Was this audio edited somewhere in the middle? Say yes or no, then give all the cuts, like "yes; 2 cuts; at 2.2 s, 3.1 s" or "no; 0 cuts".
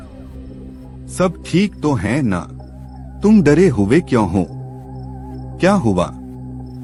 no; 0 cuts